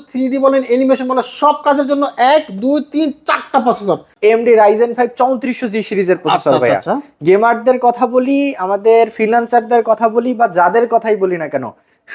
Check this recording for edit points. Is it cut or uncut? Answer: cut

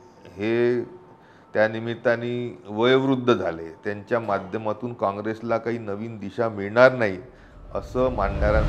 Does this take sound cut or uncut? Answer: uncut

